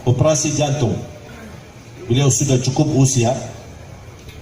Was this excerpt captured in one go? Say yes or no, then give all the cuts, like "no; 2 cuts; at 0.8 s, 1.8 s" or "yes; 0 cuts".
yes; 0 cuts